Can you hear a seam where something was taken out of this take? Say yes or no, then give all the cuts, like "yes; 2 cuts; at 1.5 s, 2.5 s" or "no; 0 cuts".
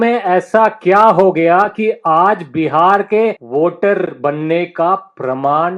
yes; 1 cut; at 3.4 s